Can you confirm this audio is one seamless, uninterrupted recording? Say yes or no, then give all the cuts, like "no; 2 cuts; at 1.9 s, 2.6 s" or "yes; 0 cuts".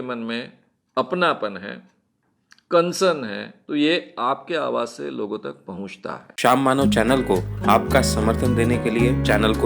no; 1 cut; at 6.3 s